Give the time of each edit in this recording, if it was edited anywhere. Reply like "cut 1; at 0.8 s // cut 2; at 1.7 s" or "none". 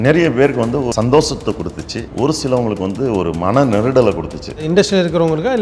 cut 1; at 0.9 s // cut 2; at 2.0 s // cut 3; at 4.6 s